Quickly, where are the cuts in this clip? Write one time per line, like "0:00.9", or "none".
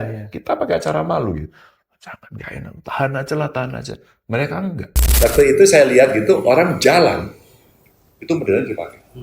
0:05.2